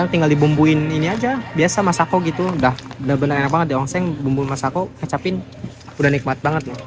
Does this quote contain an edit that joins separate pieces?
no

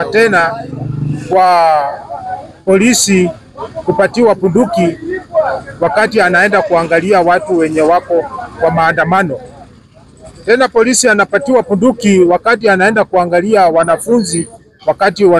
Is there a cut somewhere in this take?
no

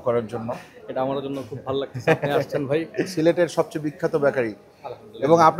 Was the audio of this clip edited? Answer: no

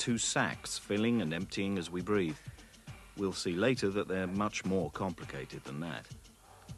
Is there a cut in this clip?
yes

